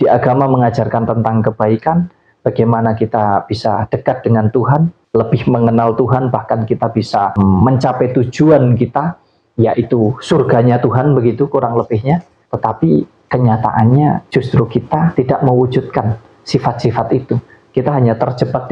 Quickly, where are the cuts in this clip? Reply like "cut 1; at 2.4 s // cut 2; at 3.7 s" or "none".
cut 1; at 5.0 s // cut 2; at 12.4 s